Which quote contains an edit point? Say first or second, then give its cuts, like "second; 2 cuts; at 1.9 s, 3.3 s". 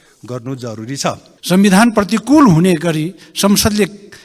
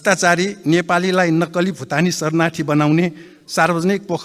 first; 1 cut; at 1.3 s